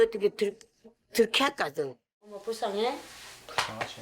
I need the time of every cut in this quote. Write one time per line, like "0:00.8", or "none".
0:02.4